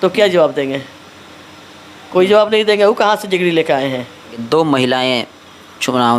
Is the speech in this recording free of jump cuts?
no; 1 cut; at 4.4 s

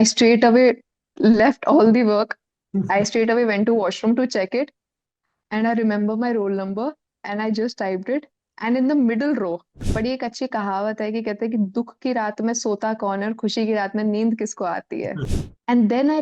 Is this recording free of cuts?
no; 2 cuts; at 9.9 s, 15.2 s

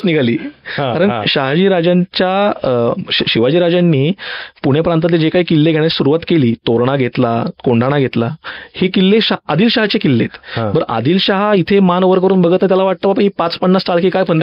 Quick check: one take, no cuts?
yes; 0 cuts

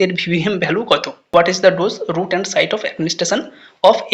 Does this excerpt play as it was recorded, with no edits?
no; 1 cut; at 1.2 s

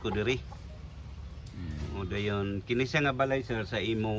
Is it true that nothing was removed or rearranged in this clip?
yes; 0 cuts

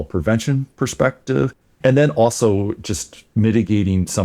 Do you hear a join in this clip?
no; 0 cuts

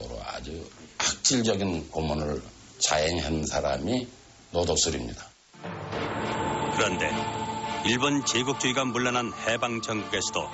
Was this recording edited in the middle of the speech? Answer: yes; 3 cuts; at 2.9 s, 2.9 s, 4.0 s

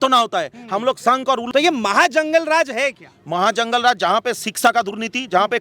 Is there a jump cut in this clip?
yes; 1 cut; at 1.4 s

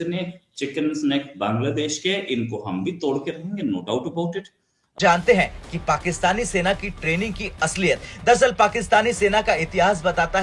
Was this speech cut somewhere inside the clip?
yes; 1 cut; at 4.9 s

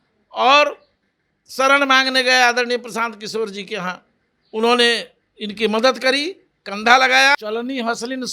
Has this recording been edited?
yes; 1 cut; at 7.4 s

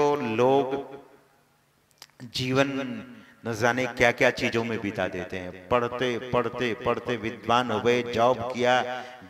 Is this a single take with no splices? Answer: yes; 0 cuts

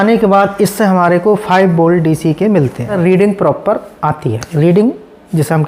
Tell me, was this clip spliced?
yes; 1 cut; at 3.0 s

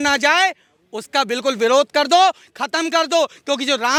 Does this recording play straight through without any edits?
yes; 0 cuts

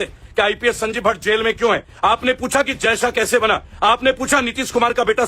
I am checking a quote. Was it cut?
yes; 2 cuts; at 1.9 s, 3.7 s

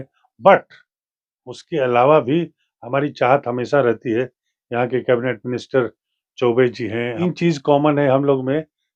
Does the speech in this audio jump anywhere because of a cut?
yes; 1 cut; at 7.2 s

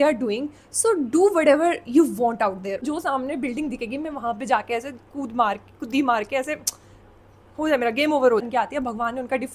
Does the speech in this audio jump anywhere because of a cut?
yes; 2 cuts; at 2.8 s, 8.5 s

